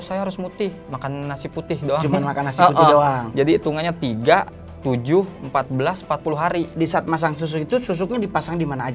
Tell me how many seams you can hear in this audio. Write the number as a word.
two